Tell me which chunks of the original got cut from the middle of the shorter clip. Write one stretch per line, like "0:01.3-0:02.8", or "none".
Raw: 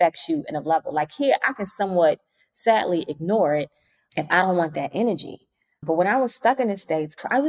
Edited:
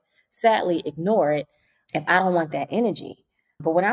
none